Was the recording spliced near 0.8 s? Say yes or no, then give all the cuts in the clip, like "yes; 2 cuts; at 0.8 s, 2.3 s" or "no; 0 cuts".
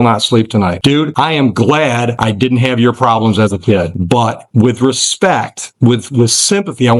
no; 0 cuts